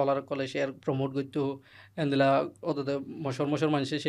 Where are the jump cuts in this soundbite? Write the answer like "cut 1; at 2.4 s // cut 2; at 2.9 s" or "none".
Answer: cut 1; at 1.7 s